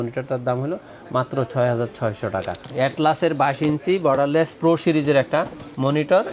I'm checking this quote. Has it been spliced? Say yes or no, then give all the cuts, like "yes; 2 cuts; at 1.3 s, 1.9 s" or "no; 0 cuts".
yes; 1 cut; at 2.6 s